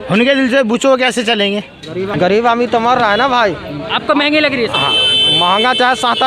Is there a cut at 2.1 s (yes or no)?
yes